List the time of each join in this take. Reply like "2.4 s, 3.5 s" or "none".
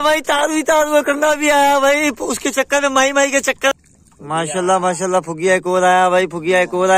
3.7 s

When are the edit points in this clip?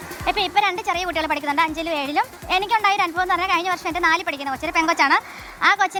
none

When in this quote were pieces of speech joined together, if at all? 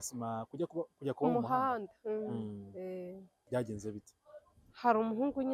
3.3 s

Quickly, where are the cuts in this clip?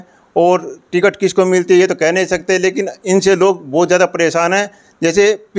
none

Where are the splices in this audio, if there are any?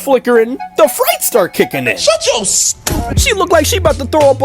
3.1 s

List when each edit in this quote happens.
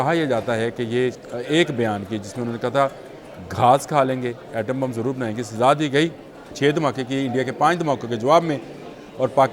1.2 s, 6.5 s

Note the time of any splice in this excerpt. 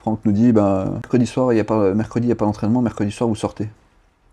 1.1 s

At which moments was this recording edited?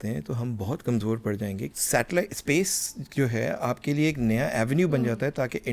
1.7 s

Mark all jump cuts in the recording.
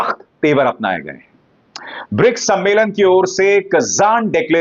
none

